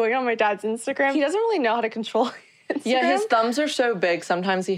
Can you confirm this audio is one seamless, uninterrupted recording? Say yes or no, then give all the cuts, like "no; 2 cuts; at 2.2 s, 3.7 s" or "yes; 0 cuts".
no; 1 cut; at 1.1 s